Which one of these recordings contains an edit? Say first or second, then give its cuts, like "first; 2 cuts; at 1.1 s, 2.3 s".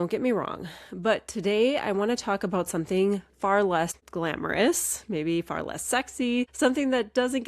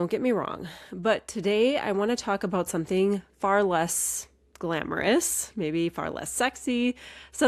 first; 2 cuts; at 4.0 s, 6.5 s